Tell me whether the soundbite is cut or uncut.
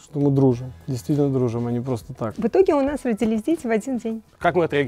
cut